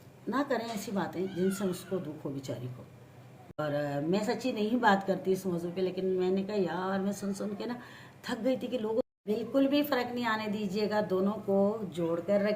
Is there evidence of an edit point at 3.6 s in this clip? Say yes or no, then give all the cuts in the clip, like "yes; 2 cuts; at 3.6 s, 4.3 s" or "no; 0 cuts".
yes; 2 cuts; at 3.6 s, 9.0 s